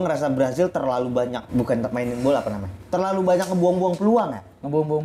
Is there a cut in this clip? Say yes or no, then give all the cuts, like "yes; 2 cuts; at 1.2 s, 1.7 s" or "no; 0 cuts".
yes; 1 cut; at 1.4 s